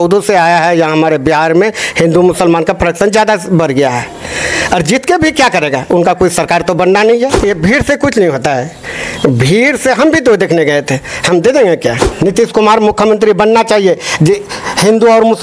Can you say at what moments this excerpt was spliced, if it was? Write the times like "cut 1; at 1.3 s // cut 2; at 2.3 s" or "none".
cut 1; at 7.4 s // cut 2; at 12.1 s